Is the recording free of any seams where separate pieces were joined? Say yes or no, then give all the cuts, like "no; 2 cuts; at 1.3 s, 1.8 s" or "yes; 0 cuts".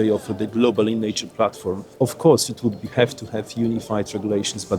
no; 1 cut; at 1.8 s